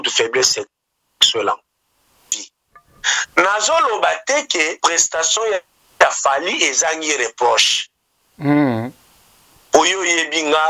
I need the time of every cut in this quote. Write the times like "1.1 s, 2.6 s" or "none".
2.3 s